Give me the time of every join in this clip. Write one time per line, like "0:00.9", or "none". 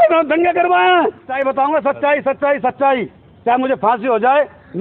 0:01.3

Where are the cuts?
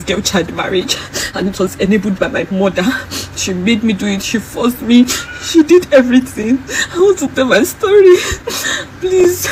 none

